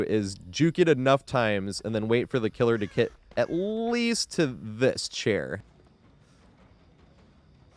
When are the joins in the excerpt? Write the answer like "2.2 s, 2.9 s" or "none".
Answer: 5.6 s